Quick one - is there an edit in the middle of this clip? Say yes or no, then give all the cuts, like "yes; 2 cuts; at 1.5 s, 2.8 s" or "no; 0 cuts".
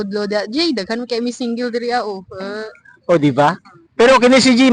yes; 1 cut; at 3.6 s